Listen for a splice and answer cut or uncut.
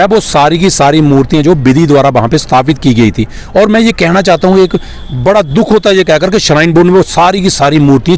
uncut